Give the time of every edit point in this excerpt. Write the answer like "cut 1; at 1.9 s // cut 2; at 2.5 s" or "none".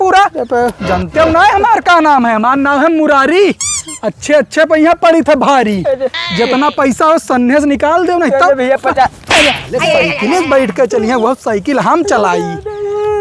none